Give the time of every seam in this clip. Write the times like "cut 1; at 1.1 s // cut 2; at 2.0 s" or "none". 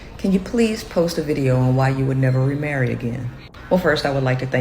cut 1; at 2.0 s // cut 2; at 3.8 s